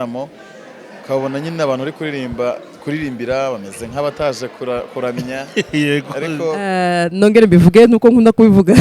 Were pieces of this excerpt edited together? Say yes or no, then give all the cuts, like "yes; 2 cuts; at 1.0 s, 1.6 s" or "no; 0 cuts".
yes; 1 cut; at 6.6 s